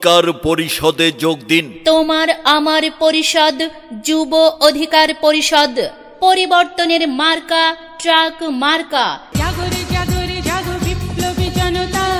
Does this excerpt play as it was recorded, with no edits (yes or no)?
yes